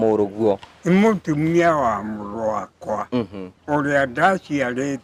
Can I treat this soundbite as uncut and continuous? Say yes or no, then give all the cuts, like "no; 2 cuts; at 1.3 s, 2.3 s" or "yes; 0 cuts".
yes; 0 cuts